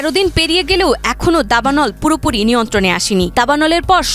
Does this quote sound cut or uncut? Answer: uncut